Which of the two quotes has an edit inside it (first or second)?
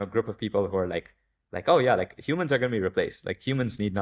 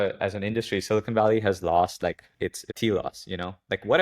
second